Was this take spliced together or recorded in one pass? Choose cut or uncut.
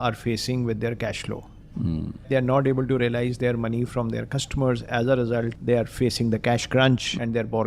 cut